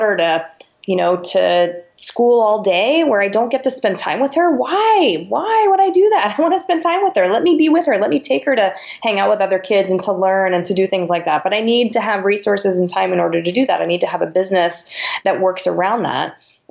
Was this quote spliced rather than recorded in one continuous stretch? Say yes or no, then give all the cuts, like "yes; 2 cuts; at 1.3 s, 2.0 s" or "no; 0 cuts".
no; 0 cuts